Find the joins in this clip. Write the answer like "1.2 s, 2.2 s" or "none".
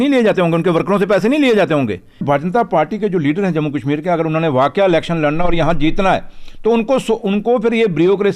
2.2 s